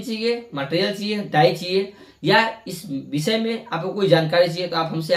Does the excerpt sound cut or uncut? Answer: uncut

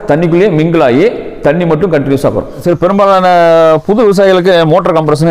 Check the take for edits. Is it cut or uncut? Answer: cut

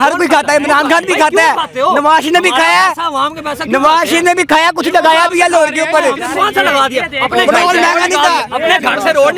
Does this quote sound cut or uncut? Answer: uncut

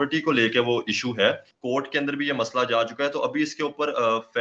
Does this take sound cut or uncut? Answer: cut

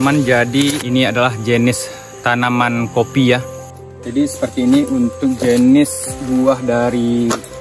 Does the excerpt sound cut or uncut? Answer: cut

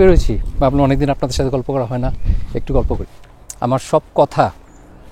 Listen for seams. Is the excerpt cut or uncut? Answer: cut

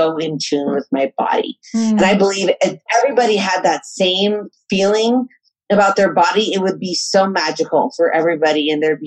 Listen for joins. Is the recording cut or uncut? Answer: cut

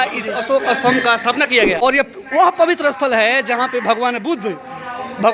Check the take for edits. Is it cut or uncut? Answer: cut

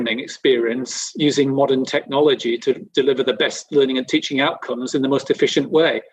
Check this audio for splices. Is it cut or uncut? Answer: uncut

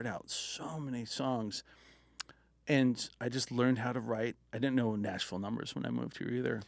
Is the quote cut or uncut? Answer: uncut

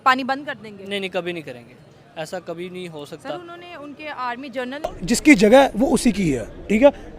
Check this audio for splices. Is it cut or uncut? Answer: cut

